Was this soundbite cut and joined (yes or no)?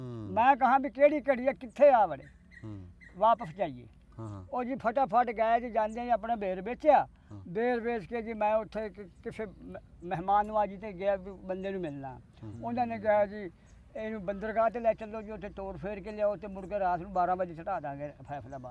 no